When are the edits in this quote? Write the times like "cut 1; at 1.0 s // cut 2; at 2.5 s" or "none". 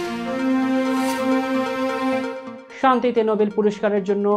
cut 1; at 2.4 s